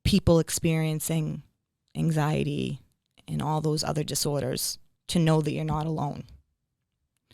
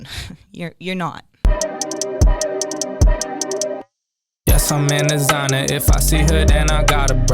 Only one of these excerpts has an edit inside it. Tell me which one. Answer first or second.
second